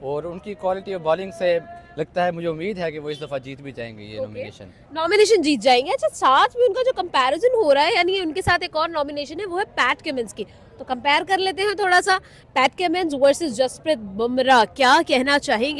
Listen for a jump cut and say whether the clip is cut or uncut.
uncut